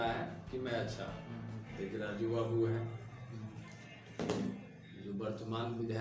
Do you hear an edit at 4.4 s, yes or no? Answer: no